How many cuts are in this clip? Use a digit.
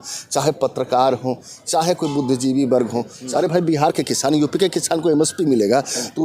1